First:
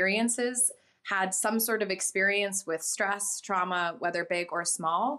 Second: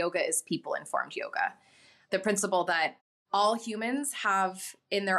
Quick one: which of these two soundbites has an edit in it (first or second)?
second